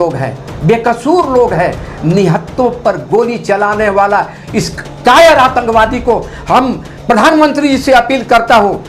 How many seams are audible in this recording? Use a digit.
1